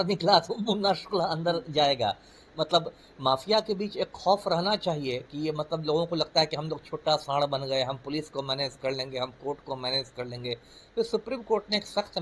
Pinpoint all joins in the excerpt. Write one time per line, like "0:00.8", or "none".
none